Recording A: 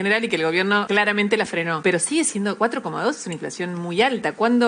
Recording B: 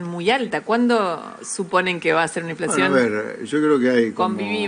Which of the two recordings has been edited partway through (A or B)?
A